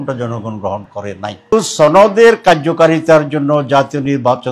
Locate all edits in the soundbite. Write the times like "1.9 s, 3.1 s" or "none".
1.5 s